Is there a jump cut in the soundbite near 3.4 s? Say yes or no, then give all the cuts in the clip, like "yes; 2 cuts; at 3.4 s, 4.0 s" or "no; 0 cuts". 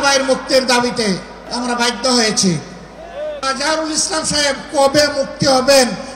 yes; 2 cuts; at 1.4 s, 3.4 s